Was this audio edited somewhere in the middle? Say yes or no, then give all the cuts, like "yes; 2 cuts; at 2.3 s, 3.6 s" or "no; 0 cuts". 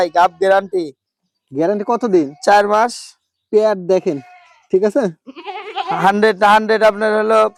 no; 0 cuts